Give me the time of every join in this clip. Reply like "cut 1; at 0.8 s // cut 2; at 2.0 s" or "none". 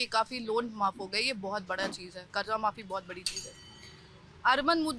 none